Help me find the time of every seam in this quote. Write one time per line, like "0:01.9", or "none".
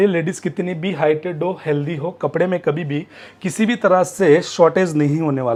none